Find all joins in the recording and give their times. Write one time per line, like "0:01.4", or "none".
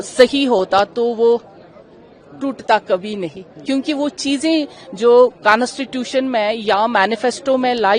none